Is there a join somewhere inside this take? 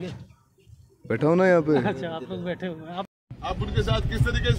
no; 0 cuts

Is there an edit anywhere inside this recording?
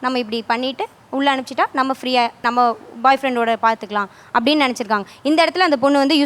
no; 0 cuts

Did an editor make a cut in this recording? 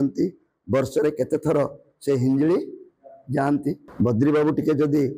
yes; 1 cut; at 3.8 s

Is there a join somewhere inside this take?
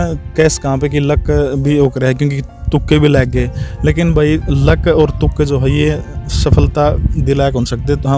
no; 0 cuts

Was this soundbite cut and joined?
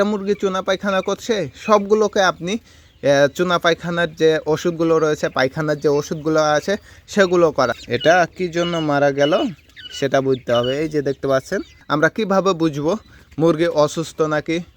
yes; 2 cuts; at 7.8 s, 11.7 s

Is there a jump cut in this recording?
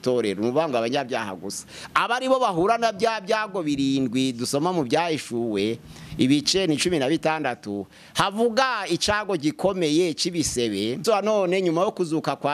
yes; 1 cut; at 11.0 s

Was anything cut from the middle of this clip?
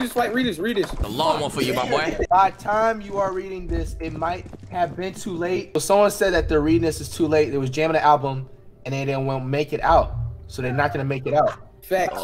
yes; 3 cuts; at 1.0 s, 2.1 s, 5.7 s

